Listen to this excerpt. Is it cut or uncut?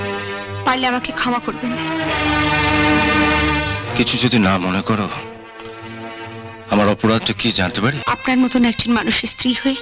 cut